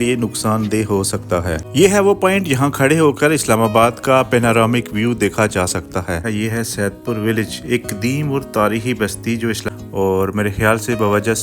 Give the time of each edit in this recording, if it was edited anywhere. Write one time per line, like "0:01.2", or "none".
0:01.6
0:06.2
0:09.6